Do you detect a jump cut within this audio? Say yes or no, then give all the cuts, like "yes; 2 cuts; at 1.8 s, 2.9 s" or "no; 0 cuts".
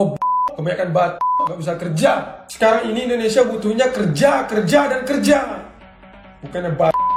no; 0 cuts